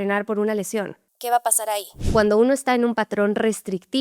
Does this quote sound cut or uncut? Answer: cut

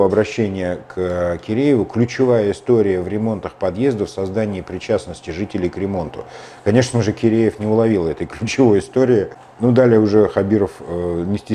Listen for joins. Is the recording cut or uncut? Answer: uncut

